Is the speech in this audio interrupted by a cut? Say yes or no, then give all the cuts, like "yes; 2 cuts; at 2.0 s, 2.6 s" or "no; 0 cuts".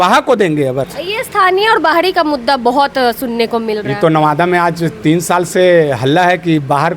yes; 1 cut; at 0.9 s